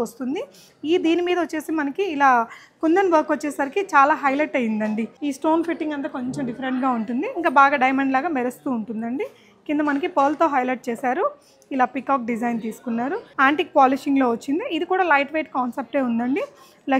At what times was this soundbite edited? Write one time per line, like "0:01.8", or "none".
0:05.1
0:13.2